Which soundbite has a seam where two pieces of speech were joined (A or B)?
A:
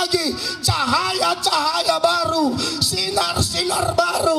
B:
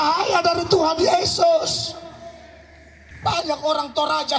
B